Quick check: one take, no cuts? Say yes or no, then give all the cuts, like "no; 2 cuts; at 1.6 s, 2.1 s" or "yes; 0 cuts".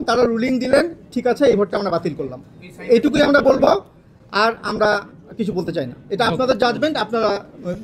yes; 0 cuts